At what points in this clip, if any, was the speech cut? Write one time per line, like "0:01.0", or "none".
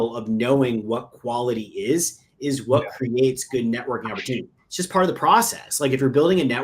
0:04.6

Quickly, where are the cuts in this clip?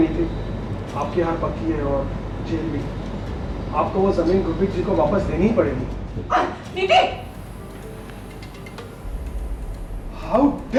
none

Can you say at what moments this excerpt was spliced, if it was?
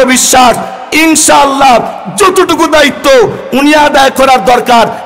none

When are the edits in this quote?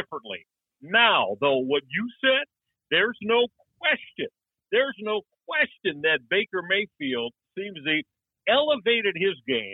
none

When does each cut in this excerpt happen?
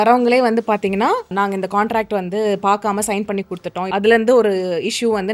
0:01.3
0:03.9

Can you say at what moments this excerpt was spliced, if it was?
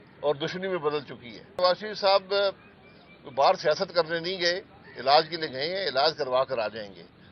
0:01.6

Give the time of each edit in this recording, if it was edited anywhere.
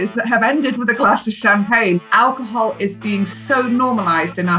0:02.0

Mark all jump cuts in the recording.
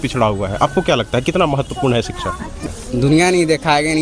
0:02.6

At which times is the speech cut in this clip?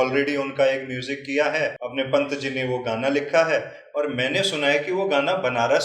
0:01.8

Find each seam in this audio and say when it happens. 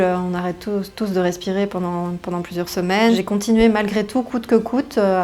0:03.2

